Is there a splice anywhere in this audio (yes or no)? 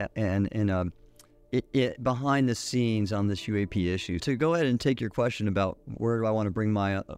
yes